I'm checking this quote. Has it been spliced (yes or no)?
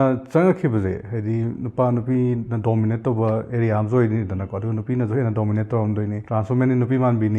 yes